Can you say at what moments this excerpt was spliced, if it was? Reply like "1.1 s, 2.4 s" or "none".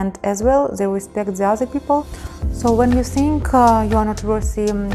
2.5 s

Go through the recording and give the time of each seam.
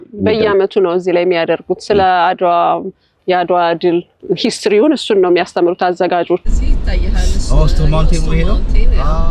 3.2 s, 4.1 s, 6.5 s

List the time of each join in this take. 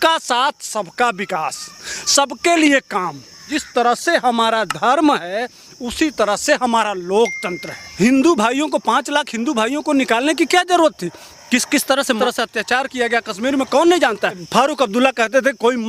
3.6 s, 7.9 s, 14.4 s

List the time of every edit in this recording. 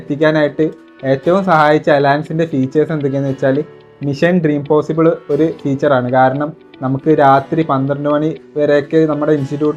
none

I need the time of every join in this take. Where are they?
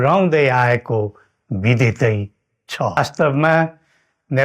3.0 s

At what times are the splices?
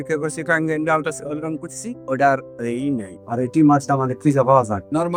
none

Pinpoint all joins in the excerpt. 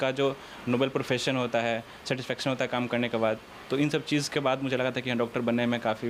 none

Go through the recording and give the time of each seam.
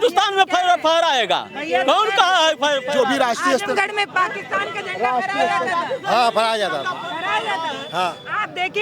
none

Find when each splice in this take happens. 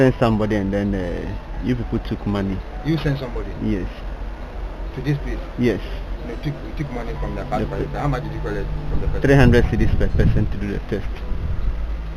none

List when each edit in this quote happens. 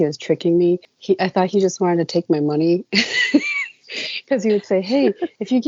0.9 s

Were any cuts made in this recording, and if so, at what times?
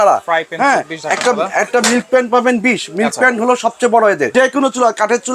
4.3 s

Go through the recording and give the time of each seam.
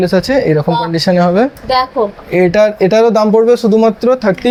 none

